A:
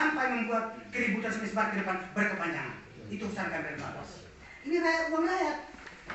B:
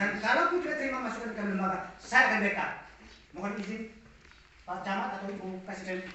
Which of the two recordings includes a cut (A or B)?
A